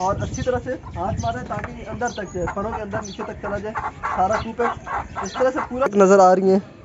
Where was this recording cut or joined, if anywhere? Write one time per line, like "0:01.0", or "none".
0:05.9